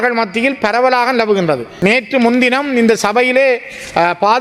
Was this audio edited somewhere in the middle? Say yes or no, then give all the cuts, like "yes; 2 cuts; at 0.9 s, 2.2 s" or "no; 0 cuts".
yes; 1 cut; at 1.7 s